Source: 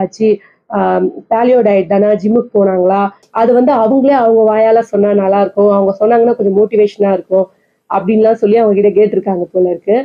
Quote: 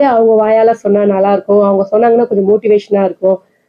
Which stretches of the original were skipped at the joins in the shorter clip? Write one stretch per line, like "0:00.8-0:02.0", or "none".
none